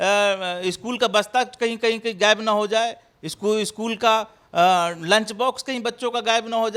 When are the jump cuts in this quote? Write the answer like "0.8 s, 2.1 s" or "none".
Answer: none